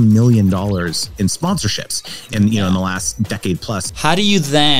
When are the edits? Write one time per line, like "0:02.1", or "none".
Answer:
0:01.4
0:03.8